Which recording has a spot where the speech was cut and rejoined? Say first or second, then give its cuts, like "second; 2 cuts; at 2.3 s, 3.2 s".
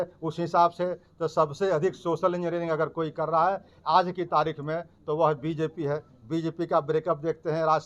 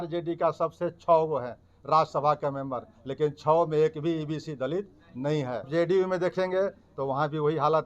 second; 1 cut; at 5.7 s